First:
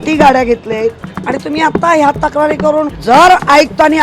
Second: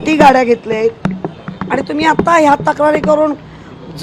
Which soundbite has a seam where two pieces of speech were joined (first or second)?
first